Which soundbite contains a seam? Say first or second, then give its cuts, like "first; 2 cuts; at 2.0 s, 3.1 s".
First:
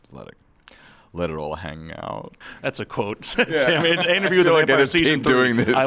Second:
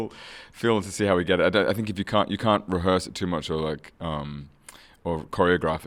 first; 1 cut; at 2.4 s